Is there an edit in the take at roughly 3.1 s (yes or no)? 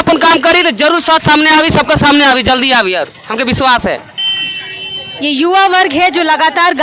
no